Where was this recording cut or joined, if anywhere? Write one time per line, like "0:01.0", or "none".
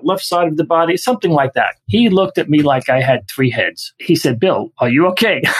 0:01.8
0:03.9
0:04.7